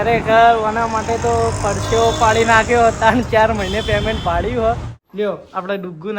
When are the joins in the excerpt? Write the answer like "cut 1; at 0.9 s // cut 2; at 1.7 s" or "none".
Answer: cut 1; at 4.9 s